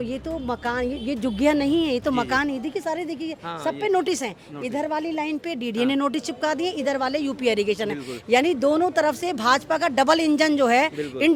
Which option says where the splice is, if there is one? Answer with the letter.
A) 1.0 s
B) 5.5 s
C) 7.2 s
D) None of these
D